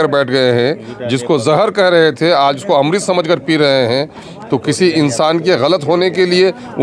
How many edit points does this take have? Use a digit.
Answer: 0